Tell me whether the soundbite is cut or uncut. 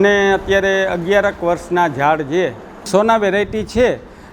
cut